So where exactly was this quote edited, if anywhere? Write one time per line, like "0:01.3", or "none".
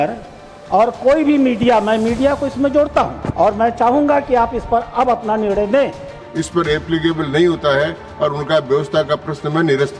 0:03.2
0:06.2

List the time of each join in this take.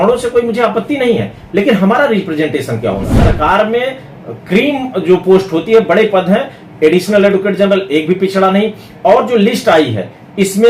0:03.2

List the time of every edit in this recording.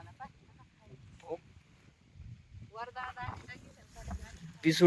none

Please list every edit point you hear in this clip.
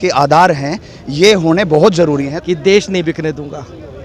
0:02.3

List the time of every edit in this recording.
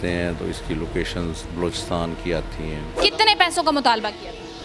0:02.9

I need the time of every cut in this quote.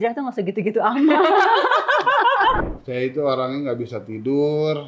0:02.6

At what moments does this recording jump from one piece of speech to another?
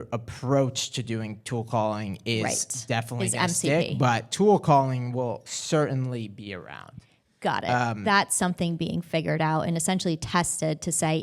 none

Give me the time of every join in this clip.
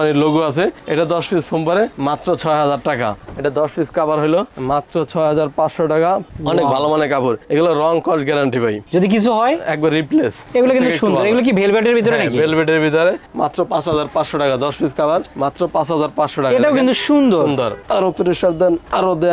0:03.2
0:06.3
0:10.4
0:17.8

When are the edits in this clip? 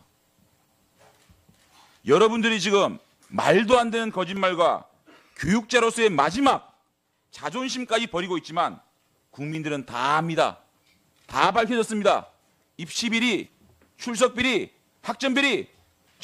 0:11.3

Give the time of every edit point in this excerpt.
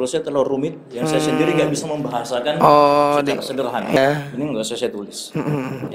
0:04.0

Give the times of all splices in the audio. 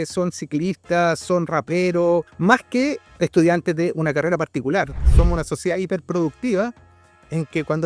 0:02.3
0:05.1

